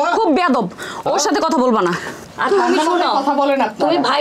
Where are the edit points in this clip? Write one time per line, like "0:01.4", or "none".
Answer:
0:02.1